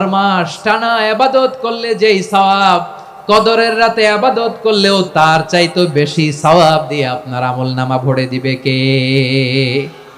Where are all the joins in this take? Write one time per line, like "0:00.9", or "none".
0:05.1